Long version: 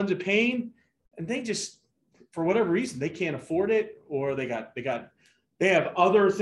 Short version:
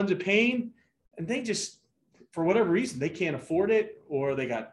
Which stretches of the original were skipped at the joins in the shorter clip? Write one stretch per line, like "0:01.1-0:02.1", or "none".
none